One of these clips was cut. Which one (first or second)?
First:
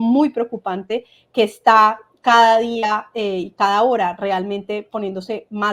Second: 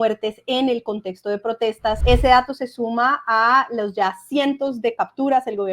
second